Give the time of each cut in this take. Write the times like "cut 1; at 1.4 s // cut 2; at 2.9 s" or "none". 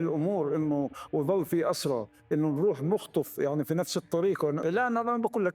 cut 1; at 4.6 s